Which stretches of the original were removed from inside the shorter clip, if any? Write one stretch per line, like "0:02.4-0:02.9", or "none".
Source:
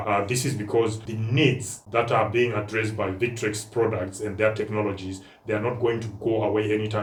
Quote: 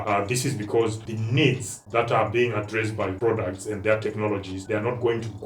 0:03.1-0:03.7
0:05.1-0:05.3